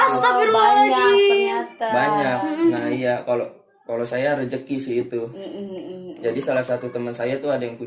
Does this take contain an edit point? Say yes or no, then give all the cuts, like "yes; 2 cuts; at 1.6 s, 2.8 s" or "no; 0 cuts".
no; 0 cuts